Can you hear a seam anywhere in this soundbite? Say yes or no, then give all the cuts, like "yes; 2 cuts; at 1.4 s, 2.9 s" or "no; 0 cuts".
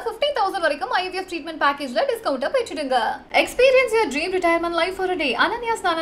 no; 0 cuts